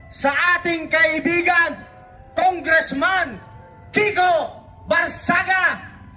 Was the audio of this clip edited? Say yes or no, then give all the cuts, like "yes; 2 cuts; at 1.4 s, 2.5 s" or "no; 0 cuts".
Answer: no; 0 cuts